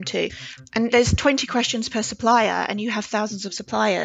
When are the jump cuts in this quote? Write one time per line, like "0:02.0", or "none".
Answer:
0:00.9